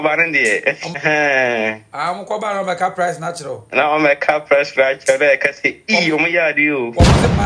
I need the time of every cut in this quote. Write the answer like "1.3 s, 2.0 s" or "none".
1.0 s